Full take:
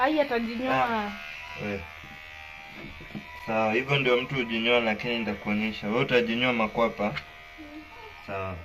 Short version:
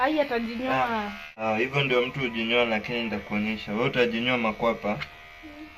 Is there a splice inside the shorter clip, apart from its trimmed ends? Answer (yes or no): yes